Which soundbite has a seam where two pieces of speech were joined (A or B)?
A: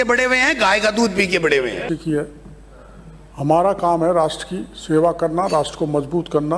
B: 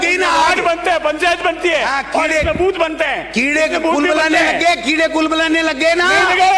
A